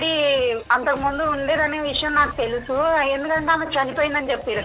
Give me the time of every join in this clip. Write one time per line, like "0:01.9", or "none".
none